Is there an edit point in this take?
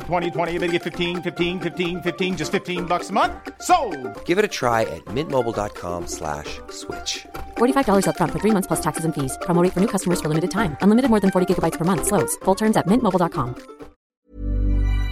yes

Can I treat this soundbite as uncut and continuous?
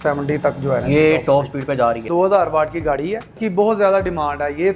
no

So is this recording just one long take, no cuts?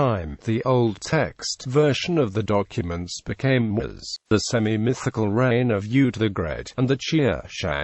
yes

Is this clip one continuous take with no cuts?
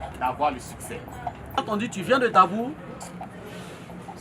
no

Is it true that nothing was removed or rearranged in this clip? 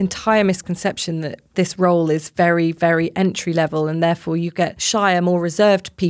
no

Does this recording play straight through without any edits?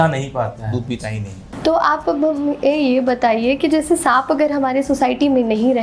no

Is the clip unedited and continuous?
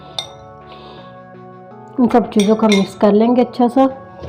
yes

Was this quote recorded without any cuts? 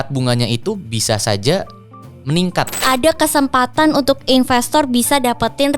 no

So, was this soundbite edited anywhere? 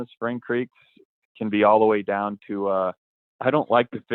no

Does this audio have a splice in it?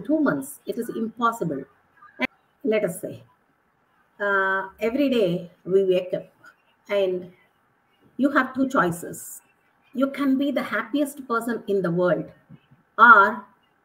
yes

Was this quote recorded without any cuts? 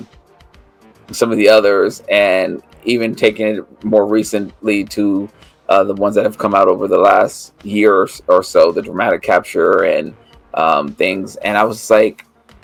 yes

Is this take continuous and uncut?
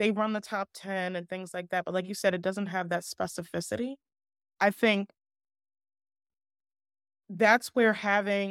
no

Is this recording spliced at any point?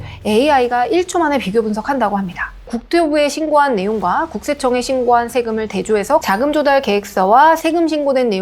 yes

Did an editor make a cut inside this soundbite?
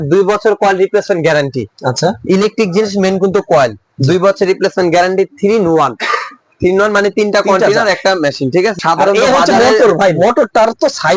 yes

